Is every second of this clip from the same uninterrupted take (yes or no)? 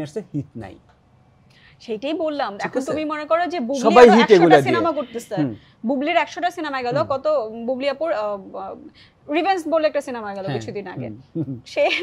yes